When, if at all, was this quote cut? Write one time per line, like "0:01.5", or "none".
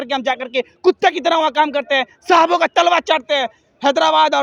none